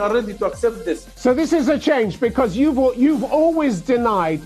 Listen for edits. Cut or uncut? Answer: cut